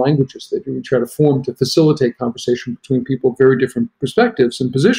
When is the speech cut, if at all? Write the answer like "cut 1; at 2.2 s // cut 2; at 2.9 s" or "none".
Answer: none